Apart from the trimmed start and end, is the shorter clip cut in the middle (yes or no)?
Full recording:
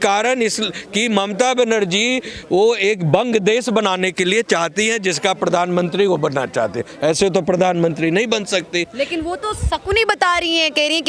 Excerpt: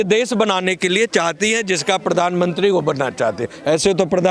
no